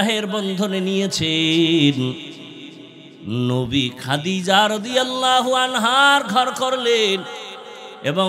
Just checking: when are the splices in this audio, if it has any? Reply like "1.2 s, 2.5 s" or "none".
none